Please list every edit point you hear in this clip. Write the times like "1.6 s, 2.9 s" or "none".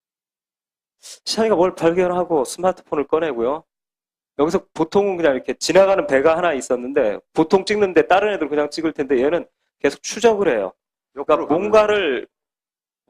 6.3 s